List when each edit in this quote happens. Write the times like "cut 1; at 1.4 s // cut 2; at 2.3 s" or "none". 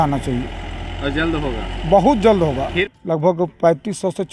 cut 1; at 2.8 s